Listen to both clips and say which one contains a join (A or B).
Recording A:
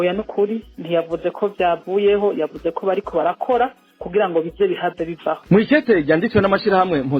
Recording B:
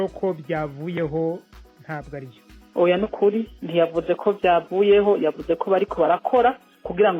A